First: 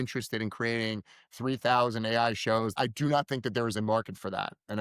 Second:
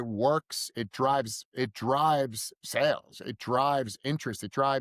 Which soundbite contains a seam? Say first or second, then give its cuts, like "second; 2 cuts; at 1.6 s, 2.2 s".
first; 1 cut; at 2.7 s